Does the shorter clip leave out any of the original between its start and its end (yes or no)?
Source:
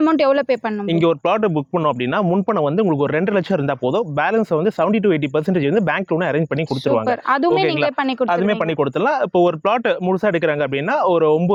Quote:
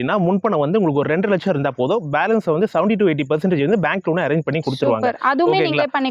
no